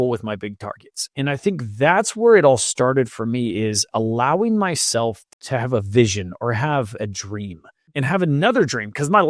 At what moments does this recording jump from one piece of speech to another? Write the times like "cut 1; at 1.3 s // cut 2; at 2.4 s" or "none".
cut 1; at 5.3 s // cut 2; at 7.9 s

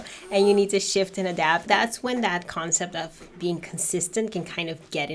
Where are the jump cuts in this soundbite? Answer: cut 1; at 1.7 s

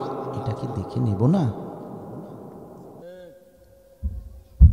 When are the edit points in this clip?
cut 1; at 3.0 s

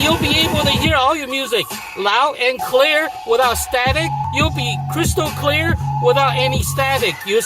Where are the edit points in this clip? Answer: cut 1; at 4.3 s

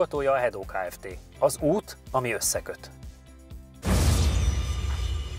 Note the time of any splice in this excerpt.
none

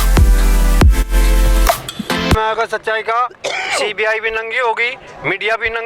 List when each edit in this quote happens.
cut 1; at 2.4 s

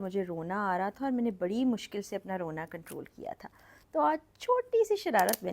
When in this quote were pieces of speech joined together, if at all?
none

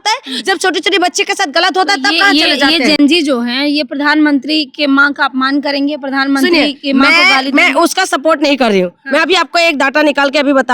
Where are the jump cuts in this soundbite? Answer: none

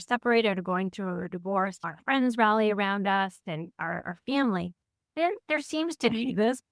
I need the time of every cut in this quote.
none

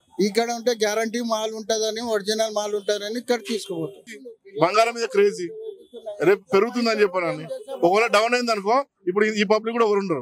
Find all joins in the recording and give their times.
cut 1; at 4.0 s

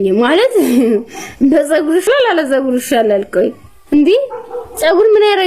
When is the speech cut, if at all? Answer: cut 1; at 2.1 s

